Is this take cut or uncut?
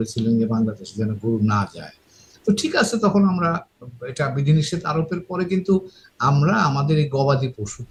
uncut